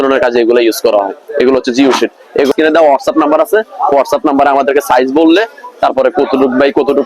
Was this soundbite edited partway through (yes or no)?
yes